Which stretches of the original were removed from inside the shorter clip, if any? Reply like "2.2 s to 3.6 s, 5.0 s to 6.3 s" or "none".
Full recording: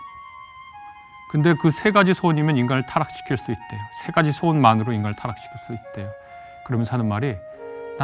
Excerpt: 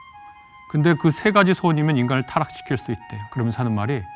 3.8 s to 6.5 s